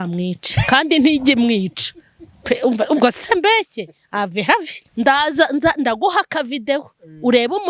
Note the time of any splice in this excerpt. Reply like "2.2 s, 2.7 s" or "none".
4.8 s